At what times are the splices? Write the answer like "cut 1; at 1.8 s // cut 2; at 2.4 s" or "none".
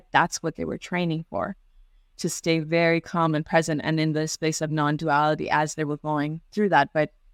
none